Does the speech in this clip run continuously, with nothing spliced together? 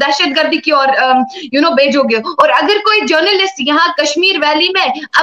yes; 0 cuts

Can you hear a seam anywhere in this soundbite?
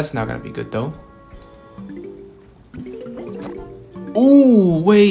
no; 0 cuts

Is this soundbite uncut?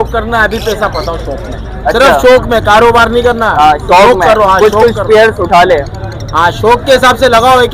yes; 0 cuts

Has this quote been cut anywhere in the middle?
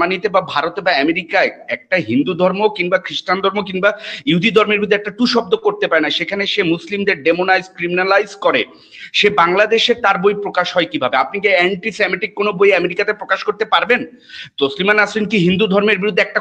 no; 0 cuts

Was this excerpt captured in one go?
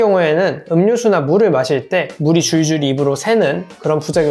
yes; 0 cuts

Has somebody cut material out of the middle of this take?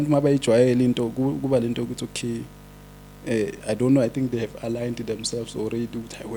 no; 0 cuts

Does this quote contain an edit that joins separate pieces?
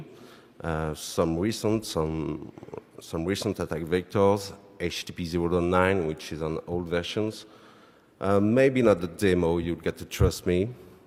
no; 0 cuts

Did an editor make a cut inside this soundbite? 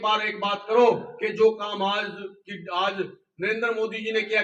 no; 0 cuts

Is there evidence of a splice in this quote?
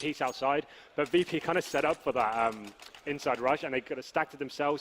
yes; 1 cut; at 3.7 s

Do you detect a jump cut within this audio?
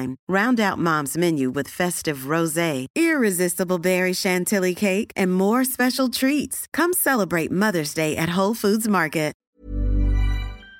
yes; 1 cut; at 9.4 s

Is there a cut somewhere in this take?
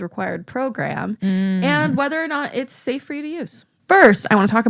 yes; 1 cut; at 3.8 s

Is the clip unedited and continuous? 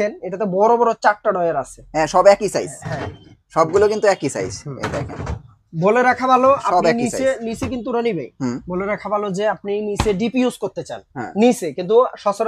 yes; 0 cuts

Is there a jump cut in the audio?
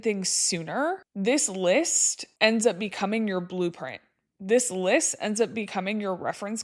yes; 1 cut; at 1.1 s

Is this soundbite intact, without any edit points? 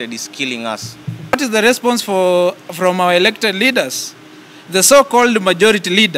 no; 1 cut; at 1.3 s

